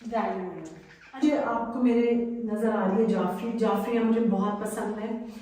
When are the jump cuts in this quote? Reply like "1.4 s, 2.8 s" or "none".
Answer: 1.2 s

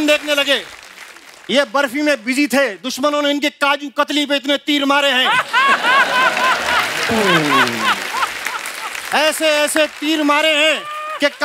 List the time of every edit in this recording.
none

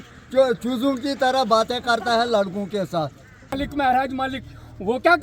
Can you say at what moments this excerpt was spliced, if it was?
3.5 s

